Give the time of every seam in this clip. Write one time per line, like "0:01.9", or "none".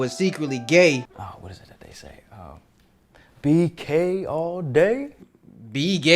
0:01.1